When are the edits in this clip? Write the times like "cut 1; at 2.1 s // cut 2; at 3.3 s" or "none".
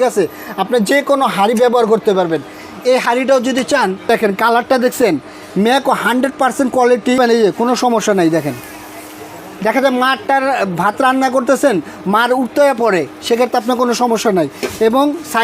cut 1; at 4.1 s // cut 2; at 7.2 s